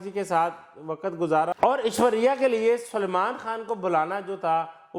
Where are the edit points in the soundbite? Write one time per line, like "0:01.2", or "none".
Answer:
0:01.5